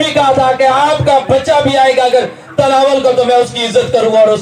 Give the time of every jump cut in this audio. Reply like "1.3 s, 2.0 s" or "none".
none